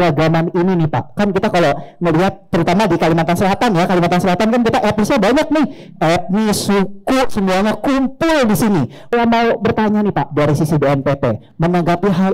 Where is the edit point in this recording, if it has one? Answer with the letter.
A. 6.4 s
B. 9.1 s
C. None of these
B